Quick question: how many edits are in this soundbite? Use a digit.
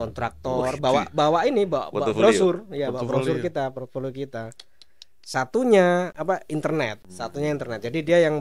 2